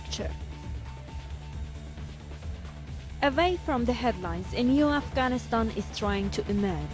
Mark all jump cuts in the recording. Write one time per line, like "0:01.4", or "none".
none